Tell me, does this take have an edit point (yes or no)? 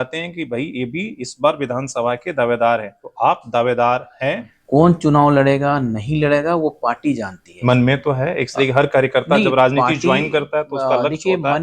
yes